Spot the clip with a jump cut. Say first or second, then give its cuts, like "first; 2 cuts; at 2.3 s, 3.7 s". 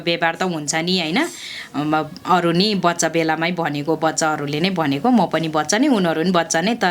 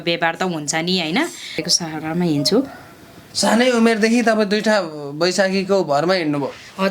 second; 1 cut; at 1.6 s